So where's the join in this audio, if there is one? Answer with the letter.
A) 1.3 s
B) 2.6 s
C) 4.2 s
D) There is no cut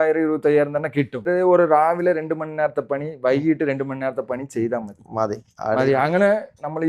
A